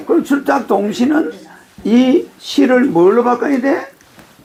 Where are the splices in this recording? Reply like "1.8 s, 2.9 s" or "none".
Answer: none